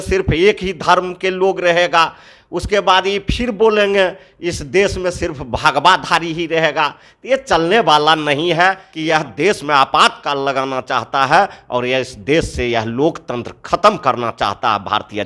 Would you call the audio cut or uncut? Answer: cut